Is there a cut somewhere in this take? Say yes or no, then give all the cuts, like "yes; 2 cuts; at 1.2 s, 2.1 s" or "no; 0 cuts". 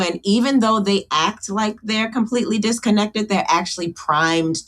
no; 0 cuts